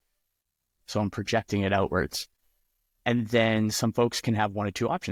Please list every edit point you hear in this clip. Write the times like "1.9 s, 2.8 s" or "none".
none